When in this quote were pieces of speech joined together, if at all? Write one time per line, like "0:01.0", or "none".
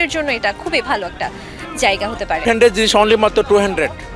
0:02.4